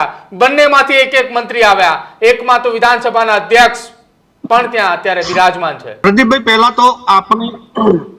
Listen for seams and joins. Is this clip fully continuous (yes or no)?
yes